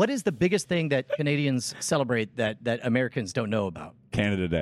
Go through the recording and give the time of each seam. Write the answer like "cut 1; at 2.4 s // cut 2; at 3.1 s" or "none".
none